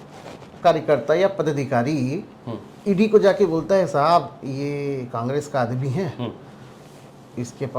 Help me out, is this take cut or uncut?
uncut